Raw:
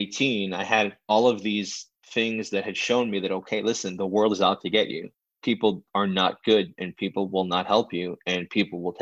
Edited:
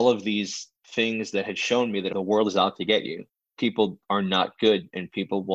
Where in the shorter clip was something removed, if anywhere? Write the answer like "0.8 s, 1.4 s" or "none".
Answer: 2.1 s